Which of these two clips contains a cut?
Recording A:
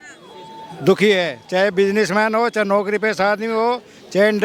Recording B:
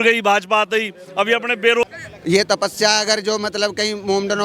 B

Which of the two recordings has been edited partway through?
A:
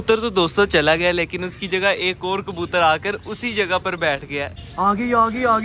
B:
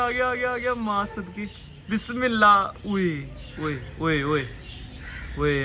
A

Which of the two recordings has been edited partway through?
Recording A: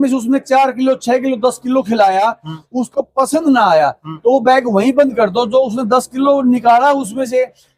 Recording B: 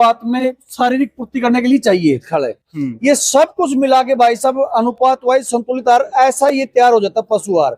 B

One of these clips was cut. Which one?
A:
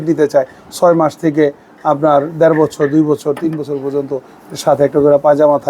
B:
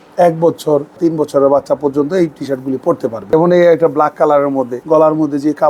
B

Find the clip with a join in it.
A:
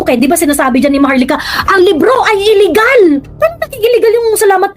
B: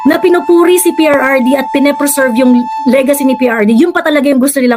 A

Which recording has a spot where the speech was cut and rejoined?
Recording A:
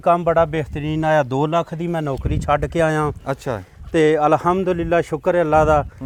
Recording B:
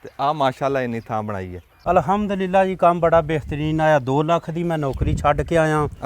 B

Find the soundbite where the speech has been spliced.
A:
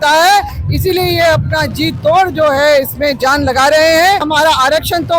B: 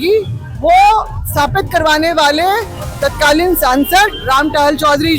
A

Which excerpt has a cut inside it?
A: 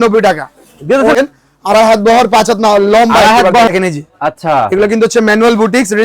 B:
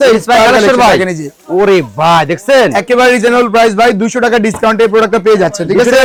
A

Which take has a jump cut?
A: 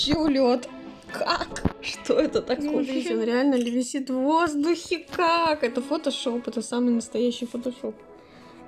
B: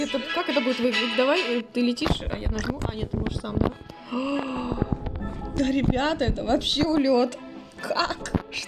A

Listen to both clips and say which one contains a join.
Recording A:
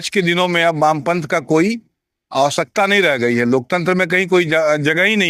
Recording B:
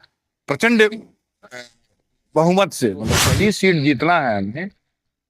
B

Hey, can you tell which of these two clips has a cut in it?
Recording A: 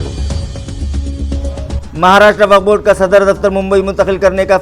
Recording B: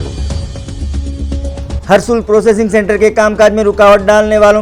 B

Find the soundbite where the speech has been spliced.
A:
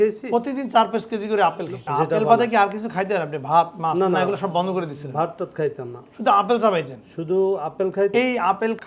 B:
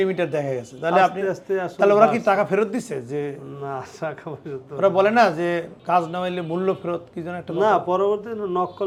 A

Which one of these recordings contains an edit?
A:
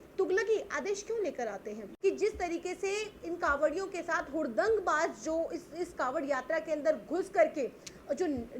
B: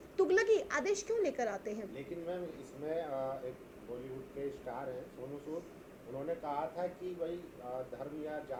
A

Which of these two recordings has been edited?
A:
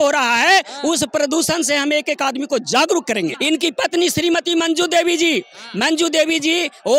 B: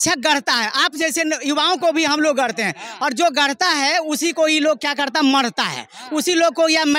A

